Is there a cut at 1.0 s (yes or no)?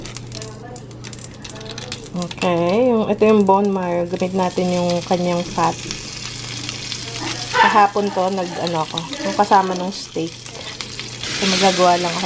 no